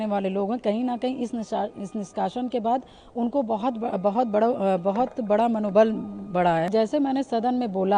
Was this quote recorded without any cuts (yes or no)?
no